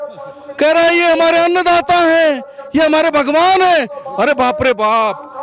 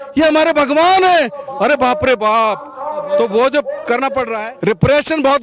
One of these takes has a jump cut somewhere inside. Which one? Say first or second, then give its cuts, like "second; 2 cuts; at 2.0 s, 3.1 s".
second; 1 cut; at 4.4 s